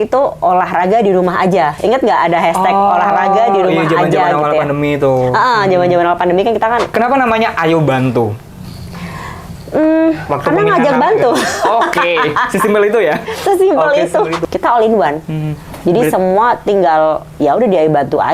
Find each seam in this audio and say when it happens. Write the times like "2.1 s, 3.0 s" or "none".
6.9 s, 14.4 s